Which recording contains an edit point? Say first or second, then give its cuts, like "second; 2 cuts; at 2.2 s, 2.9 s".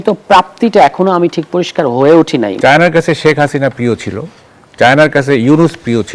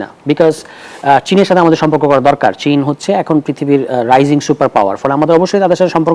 first; 1 cut; at 2.5 s